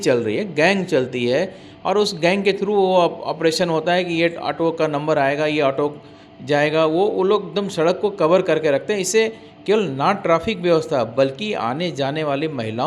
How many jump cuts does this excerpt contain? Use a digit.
0